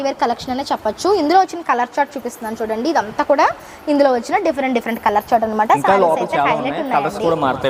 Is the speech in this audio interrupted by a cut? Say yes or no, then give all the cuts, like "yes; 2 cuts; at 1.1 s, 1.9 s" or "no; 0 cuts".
no; 0 cuts